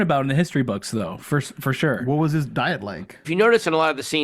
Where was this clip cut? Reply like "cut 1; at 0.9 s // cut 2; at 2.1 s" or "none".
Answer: cut 1; at 3.2 s